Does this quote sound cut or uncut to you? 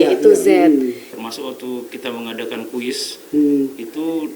cut